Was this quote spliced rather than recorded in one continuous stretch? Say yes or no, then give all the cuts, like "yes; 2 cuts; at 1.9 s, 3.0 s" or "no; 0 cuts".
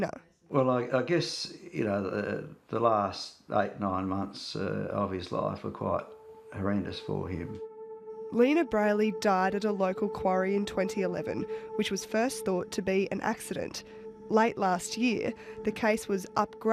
no; 0 cuts